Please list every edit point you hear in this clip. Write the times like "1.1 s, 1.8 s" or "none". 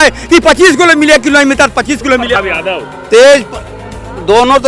2.4 s